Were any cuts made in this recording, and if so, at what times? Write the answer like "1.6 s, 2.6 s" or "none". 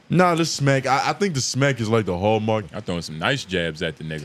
2.7 s

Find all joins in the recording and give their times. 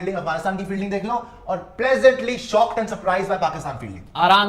none

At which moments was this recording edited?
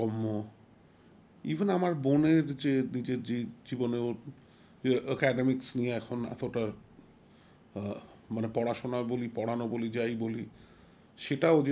none

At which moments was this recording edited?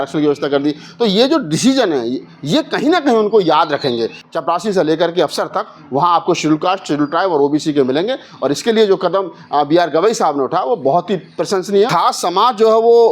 4.2 s, 11.9 s

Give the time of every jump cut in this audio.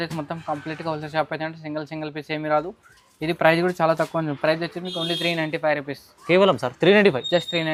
none

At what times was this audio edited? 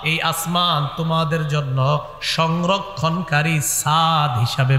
none

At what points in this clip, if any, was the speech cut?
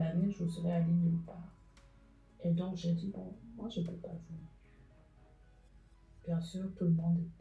none

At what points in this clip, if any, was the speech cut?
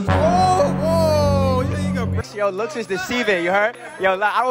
2.2 s

